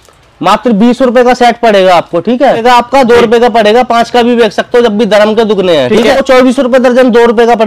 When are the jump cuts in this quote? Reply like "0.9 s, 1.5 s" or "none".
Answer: 2.6 s, 6.1 s